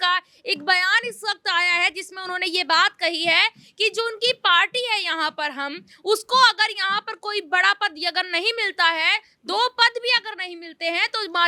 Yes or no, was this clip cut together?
no